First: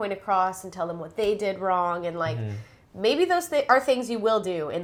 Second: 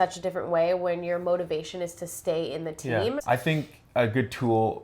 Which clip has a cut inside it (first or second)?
second